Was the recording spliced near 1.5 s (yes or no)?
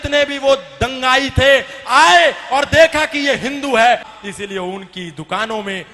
no